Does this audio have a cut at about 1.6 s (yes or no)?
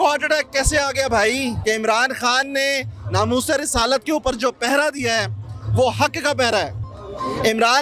yes